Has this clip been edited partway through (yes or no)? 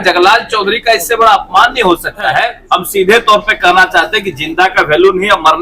yes